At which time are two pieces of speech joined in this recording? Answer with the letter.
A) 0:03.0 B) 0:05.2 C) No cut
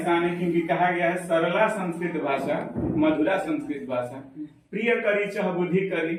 C